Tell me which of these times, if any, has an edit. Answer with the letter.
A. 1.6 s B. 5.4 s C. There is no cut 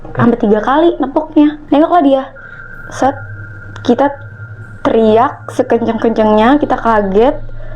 A